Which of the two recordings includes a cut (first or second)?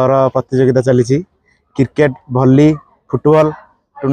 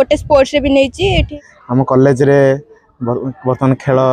second